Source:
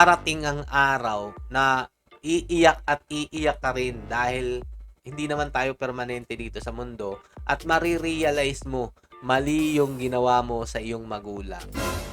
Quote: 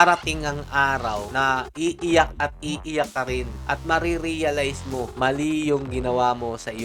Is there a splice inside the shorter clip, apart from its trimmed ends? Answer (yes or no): yes